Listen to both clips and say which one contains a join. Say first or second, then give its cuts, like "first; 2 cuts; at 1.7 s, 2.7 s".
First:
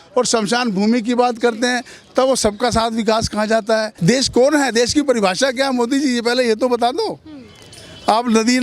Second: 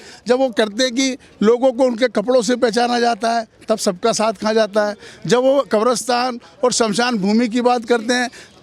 first; 1 cut; at 3.9 s